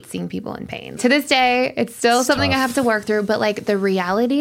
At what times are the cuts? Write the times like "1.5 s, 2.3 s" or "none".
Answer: 1.0 s